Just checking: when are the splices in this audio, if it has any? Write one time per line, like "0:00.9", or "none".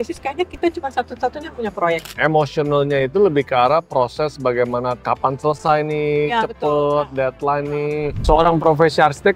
0:02.1
0:08.2